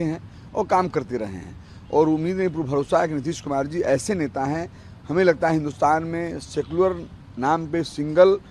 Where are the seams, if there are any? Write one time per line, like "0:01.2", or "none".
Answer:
none